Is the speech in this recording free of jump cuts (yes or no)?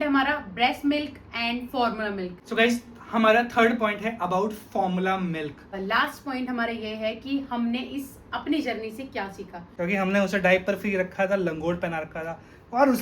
no